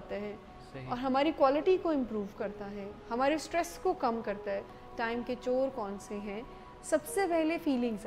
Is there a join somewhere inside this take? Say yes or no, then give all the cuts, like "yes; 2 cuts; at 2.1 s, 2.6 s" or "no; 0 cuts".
yes; 1 cut; at 4.8 s